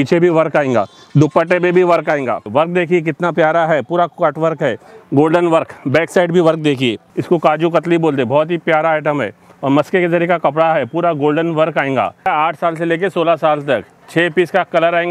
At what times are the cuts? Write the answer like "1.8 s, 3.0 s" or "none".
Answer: 2.5 s, 7.1 s, 12.3 s

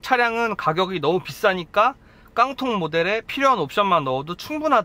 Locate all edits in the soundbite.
none

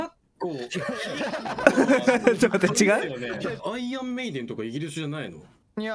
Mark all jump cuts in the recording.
3.6 s

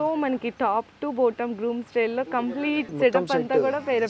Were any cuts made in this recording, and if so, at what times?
2.9 s

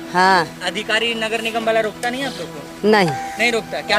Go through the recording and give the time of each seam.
none

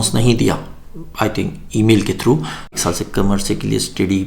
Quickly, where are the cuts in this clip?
2.8 s

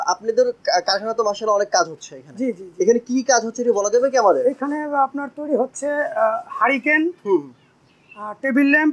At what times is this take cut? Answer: none

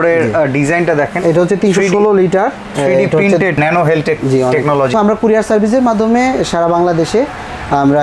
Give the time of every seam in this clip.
3.5 s, 4.9 s

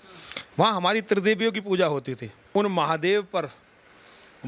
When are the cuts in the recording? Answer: 2.3 s

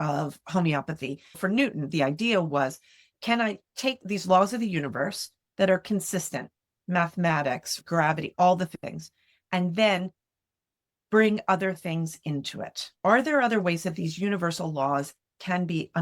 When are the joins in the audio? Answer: 1.4 s, 4.0 s, 8.2 s

